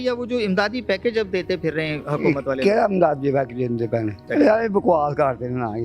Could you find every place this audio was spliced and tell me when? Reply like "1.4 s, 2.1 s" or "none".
4.2 s